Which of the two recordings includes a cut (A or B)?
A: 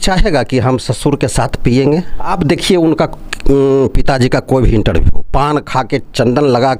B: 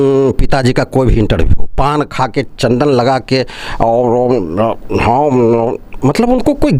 A